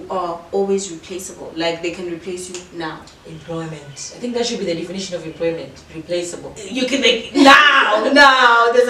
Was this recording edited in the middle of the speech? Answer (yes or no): no